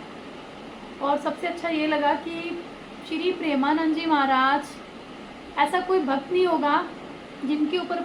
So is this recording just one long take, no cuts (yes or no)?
yes